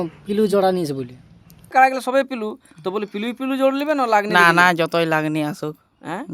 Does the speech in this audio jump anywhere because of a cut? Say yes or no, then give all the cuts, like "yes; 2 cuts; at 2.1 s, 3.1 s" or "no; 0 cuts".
yes; 1 cut; at 1.7 s